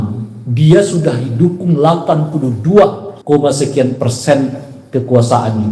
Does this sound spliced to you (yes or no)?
yes